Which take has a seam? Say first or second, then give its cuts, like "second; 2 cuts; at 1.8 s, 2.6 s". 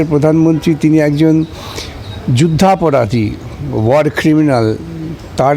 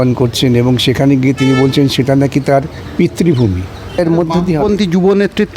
second; 1 cut; at 4.0 s